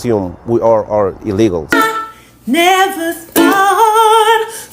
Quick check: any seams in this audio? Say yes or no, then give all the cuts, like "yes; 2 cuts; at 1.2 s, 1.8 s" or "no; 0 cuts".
yes; 1 cut; at 1.7 s